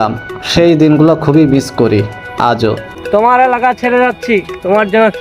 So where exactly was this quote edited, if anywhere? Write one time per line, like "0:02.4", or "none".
0:02.9